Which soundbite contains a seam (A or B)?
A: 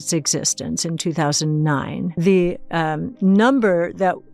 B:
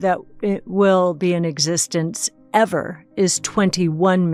A